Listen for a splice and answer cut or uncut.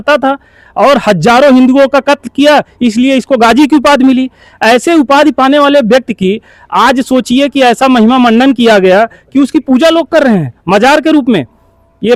uncut